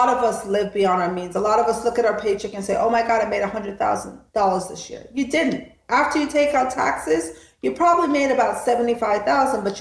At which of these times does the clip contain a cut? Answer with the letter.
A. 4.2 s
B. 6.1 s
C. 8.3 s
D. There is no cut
A